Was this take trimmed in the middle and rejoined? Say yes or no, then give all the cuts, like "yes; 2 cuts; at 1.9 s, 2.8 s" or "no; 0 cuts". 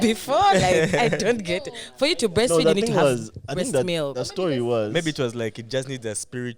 no; 0 cuts